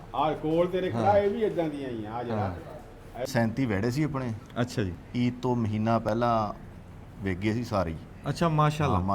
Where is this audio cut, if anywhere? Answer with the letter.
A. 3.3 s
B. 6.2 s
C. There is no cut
A